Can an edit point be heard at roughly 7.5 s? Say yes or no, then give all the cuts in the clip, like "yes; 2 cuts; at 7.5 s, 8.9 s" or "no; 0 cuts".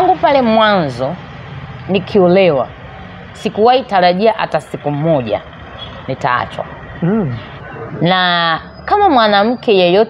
yes; 1 cut; at 7.5 s